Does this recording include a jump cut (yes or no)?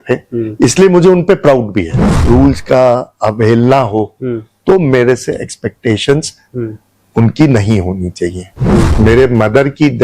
yes